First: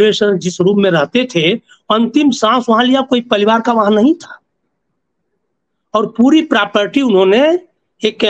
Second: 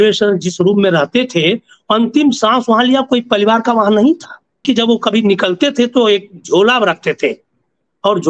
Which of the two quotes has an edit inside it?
second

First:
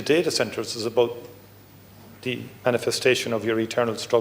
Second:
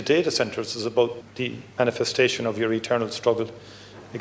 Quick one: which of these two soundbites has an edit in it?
second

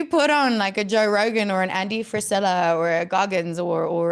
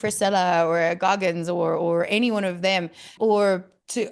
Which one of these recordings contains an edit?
second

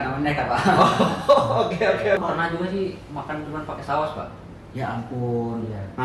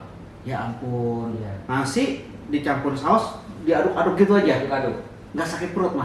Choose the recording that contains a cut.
first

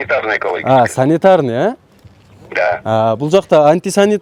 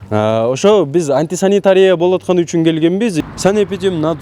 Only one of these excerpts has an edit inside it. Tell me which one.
second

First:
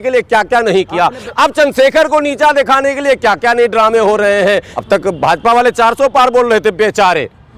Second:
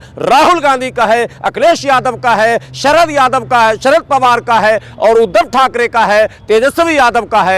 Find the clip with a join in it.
first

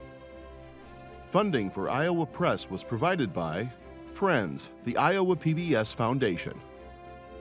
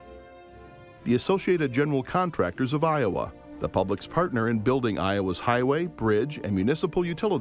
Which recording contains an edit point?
first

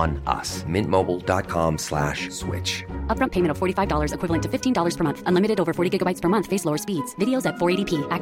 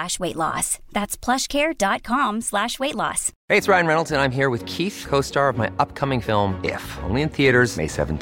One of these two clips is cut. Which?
second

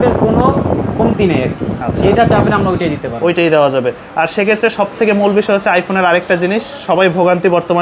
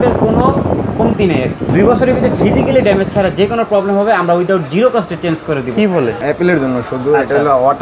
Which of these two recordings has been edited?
second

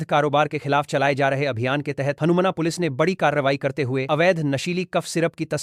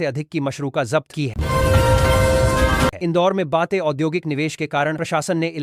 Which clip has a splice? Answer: second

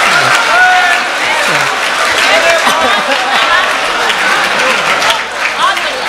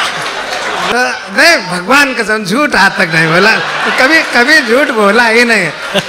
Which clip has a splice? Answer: second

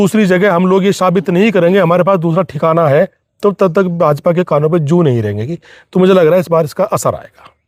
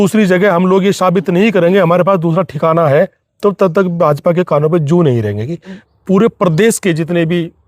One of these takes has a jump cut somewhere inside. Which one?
second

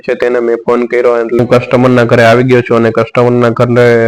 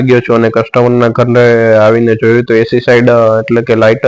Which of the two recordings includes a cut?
first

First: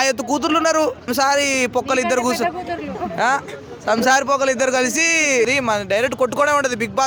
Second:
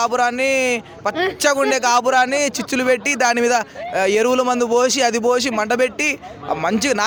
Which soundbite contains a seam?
first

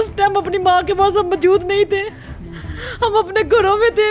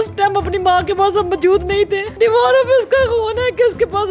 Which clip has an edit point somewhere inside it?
second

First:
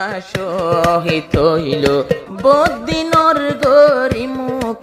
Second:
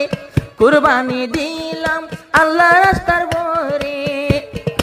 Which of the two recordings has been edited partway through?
first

